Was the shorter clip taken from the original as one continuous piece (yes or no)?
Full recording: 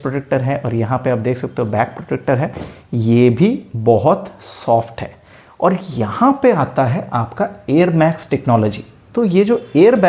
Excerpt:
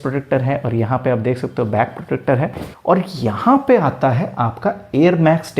no